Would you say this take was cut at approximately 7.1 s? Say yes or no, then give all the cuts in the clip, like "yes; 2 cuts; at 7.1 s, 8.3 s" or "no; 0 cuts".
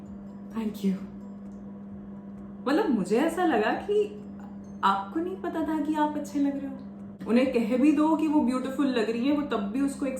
yes; 1 cut; at 7.1 s